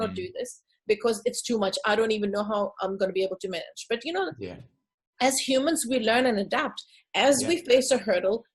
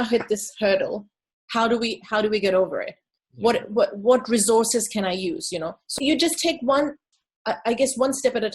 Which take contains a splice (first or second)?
second